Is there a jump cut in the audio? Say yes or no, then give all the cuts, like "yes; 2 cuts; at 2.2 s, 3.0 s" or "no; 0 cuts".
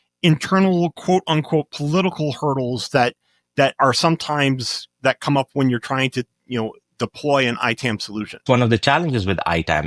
yes; 1 cut; at 8.4 s